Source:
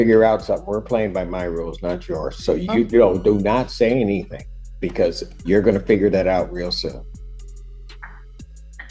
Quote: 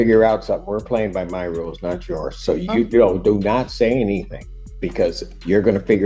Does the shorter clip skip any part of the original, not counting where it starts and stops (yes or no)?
no